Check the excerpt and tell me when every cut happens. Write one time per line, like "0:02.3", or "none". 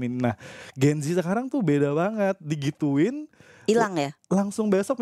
none